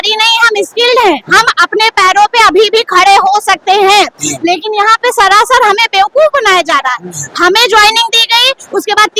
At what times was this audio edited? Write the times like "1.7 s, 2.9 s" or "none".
none